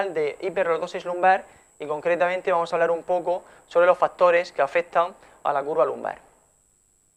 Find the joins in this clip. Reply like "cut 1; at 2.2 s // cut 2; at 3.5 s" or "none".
cut 1; at 5.2 s